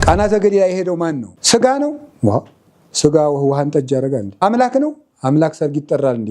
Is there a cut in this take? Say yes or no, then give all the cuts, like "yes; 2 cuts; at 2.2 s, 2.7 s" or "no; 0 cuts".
yes; 2 cuts; at 1.3 s, 4.4 s